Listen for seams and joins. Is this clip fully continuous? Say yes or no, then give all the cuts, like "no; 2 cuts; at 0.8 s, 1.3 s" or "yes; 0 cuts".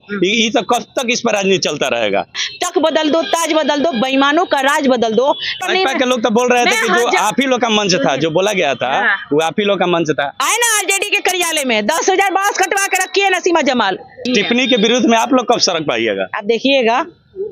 no; 4 cuts; at 2.4 s, 5.5 s, 10.3 s, 14.3 s